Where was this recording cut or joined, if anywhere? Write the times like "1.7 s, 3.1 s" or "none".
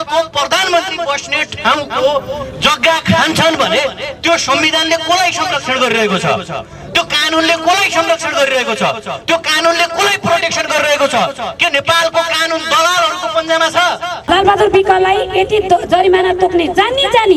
14.2 s